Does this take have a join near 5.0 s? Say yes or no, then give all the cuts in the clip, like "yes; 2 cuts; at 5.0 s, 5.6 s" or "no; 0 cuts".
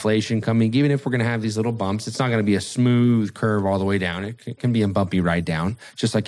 no; 0 cuts